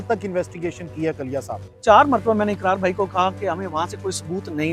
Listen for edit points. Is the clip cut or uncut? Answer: cut